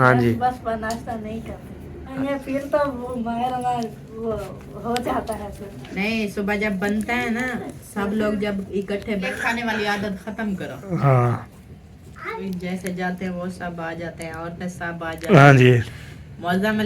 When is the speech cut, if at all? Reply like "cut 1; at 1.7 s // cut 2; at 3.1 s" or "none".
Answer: cut 1; at 2.1 s // cut 2; at 5.9 s // cut 3; at 9.3 s // cut 4; at 12.4 s